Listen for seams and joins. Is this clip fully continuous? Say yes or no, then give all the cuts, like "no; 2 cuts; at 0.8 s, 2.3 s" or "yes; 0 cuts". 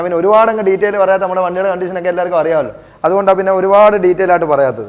yes; 0 cuts